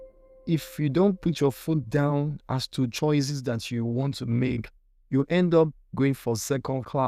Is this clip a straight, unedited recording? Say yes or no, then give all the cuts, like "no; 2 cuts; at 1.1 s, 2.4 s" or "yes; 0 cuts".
yes; 0 cuts